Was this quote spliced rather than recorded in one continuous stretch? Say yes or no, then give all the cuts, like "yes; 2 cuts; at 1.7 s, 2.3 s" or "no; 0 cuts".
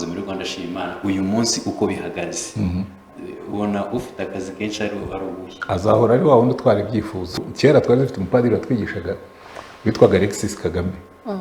yes; 1 cut; at 7.5 s